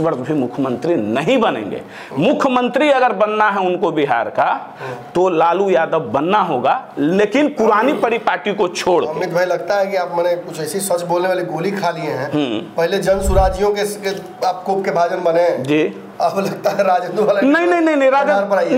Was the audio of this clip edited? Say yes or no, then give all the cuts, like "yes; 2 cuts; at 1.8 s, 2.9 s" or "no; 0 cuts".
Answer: no; 0 cuts